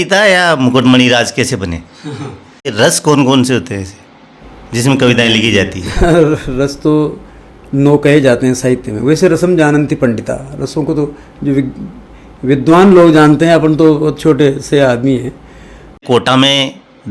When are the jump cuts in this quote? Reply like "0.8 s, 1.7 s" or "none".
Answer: 2.7 s, 16.0 s